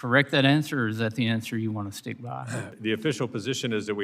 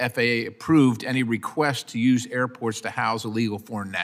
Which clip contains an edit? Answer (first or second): first